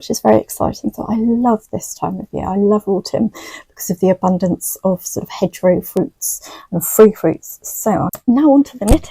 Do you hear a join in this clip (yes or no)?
yes